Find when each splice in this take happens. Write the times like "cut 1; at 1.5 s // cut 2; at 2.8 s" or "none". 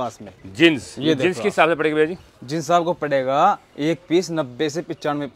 none